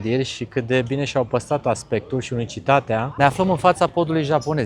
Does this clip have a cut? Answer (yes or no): yes